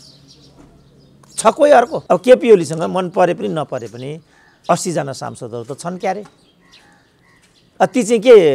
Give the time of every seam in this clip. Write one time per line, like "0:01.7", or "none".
0:02.0